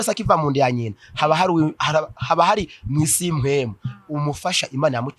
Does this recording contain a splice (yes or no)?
no